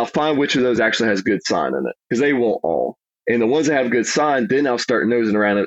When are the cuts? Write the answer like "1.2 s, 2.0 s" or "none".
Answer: 3.1 s

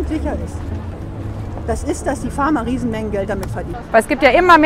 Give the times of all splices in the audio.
3.7 s

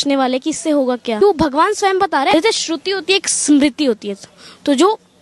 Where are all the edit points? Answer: 1.2 s, 2.3 s

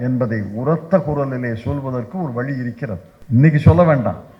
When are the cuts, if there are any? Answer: 3.1 s

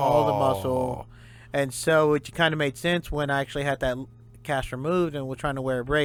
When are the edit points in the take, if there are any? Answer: none

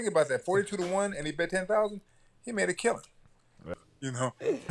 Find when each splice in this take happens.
3.6 s

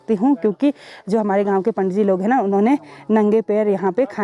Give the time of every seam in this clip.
none

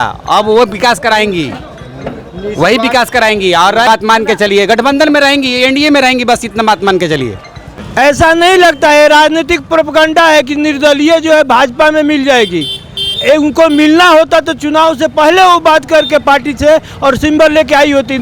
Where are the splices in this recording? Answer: 3.9 s, 7.8 s

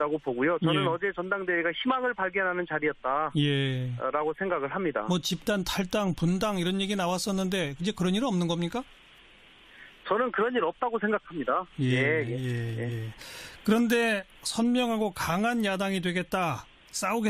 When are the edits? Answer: 14.4 s

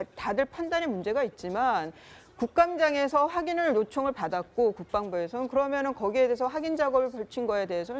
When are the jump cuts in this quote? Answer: 4.5 s

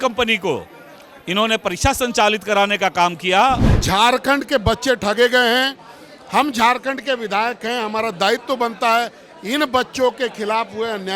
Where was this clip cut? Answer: 3.6 s

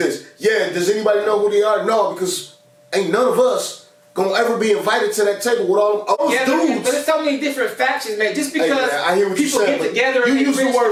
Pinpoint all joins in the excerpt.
none

